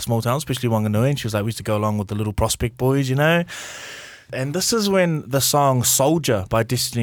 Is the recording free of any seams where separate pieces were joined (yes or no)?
no